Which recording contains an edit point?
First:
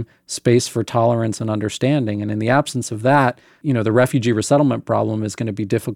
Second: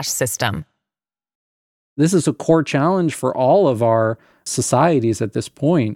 second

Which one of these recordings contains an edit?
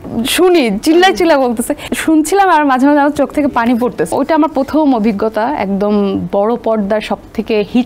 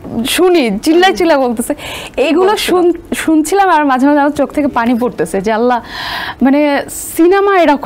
first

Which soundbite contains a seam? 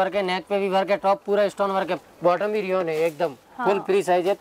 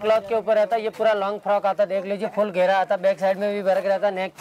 first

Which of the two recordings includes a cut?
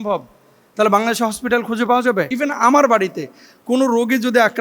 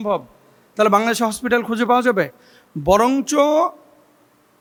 first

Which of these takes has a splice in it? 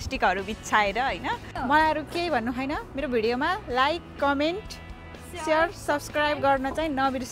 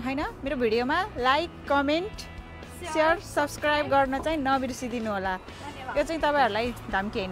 first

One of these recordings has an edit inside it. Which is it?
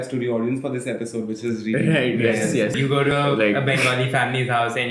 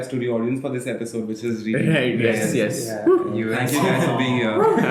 first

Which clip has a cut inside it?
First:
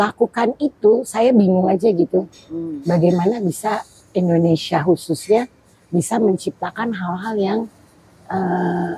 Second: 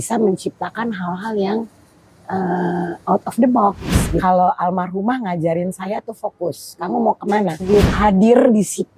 second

